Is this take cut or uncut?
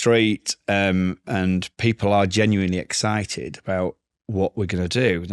uncut